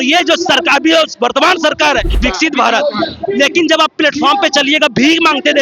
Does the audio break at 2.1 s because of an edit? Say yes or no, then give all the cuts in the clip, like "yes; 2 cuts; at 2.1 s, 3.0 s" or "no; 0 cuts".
yes; 1 cut; at 2.1 s